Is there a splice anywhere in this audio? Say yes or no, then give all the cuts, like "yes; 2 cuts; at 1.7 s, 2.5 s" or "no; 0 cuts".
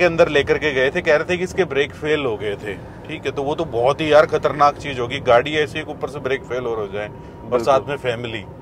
no; 0 cuts